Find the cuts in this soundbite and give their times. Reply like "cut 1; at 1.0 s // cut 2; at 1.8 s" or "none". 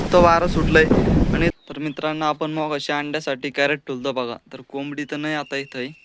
cut 1; at 1.5 s